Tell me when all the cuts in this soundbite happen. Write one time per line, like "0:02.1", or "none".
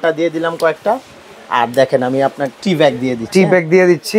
0:02.5